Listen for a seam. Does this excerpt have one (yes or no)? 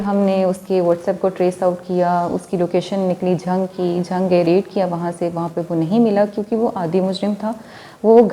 no